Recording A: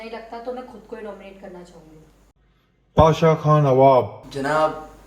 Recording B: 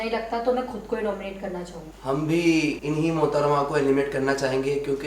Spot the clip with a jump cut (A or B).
B